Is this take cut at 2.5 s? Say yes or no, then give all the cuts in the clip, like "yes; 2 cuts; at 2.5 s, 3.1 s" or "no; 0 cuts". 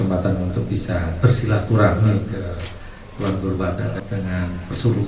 no; 1 cut; at 3.9 s